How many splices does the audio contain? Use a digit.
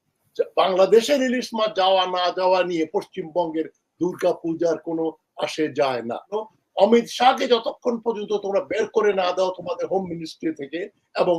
1